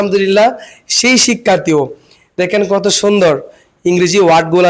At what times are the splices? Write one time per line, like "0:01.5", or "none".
none